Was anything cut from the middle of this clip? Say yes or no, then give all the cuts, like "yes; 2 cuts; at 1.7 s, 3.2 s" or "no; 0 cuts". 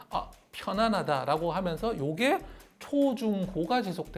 no; 0 cuts